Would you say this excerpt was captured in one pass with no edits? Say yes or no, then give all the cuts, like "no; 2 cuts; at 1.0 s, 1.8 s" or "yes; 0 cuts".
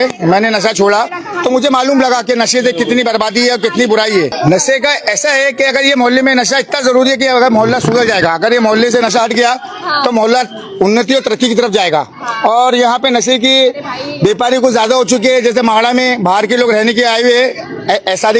yes; 0 cuts